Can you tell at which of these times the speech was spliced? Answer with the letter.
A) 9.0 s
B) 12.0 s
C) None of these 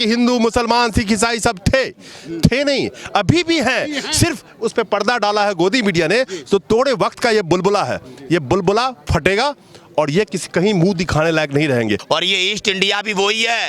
B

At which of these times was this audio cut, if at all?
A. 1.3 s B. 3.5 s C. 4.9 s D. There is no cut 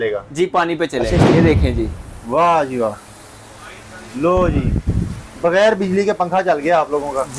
A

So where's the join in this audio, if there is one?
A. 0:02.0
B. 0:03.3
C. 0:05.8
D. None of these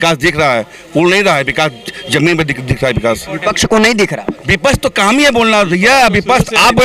D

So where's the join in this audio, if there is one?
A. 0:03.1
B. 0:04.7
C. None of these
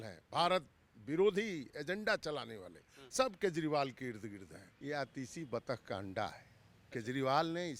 B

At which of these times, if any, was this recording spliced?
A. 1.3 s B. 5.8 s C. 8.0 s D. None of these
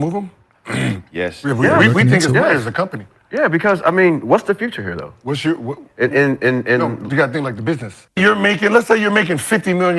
C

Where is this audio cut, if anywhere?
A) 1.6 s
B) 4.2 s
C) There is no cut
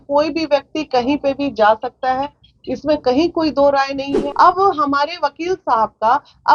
B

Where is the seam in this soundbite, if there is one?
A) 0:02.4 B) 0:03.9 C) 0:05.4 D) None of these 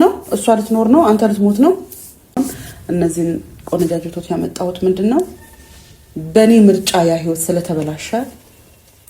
A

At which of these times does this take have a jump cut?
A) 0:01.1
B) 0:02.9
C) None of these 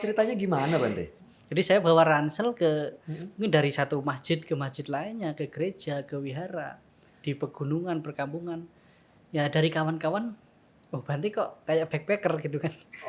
A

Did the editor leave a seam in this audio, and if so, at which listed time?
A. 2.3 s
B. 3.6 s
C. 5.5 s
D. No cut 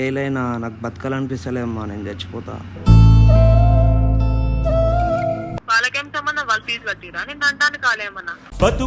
C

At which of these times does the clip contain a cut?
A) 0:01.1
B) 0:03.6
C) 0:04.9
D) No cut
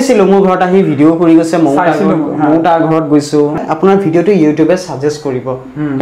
B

